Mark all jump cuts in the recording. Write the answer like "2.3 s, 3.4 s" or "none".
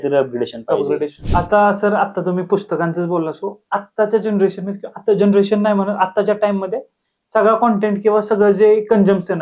1.2 s